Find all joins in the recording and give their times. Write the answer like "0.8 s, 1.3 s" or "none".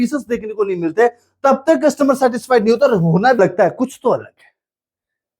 3.4 s